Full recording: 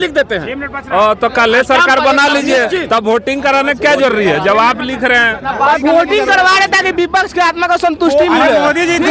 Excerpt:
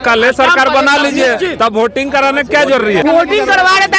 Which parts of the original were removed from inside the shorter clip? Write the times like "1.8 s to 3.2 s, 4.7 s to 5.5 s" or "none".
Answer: 4.3 s to 5.8 s

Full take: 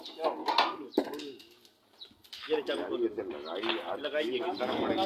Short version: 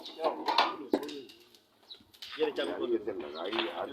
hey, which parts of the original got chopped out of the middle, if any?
0.9 s to 1.0 s

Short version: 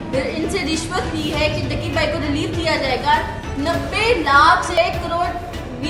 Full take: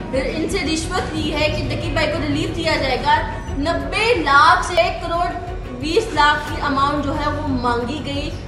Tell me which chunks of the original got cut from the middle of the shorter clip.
none

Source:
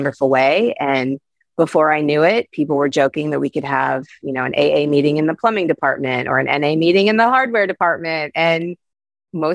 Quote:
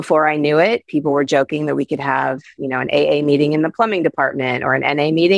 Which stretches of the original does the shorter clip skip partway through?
none

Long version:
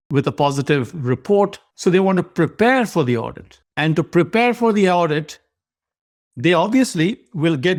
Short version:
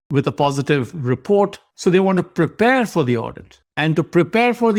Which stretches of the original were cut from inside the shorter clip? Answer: none

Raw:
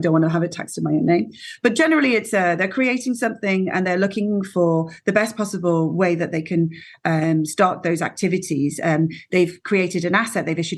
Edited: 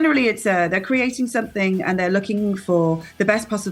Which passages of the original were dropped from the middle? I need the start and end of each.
none

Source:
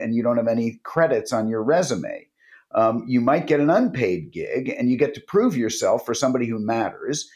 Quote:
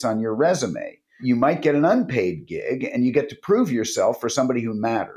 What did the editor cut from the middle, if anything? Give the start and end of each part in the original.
2.5 s to 3.0 s

